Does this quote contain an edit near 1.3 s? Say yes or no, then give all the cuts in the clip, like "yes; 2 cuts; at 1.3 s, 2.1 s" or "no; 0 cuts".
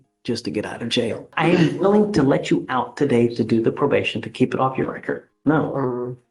yes; 2 cuts; at 1.3 s, 5.3 s